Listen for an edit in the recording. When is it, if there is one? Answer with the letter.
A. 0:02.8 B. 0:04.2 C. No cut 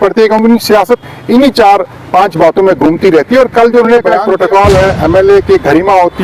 B